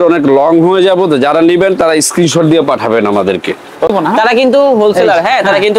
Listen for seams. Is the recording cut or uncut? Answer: cut